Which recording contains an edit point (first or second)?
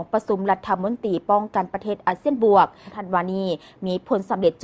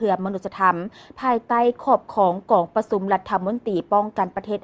first